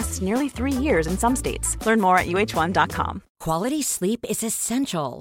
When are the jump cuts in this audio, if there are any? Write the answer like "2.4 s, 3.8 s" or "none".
3.3 s